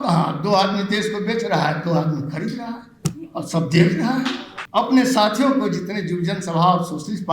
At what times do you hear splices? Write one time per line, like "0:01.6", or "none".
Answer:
0:04.5